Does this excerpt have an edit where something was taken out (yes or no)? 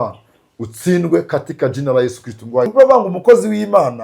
yes